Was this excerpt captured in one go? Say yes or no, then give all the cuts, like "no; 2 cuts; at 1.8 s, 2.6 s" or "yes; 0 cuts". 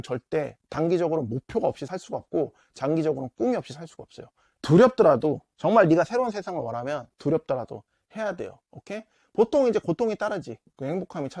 no; 1 cut; at 4.6 s